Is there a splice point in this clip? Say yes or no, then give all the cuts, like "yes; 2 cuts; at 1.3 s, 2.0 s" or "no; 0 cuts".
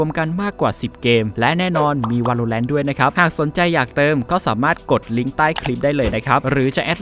no; 0 cuts